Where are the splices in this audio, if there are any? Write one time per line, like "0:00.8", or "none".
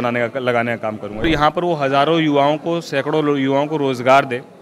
0:01.2